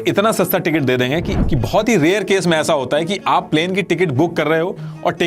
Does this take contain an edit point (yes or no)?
yes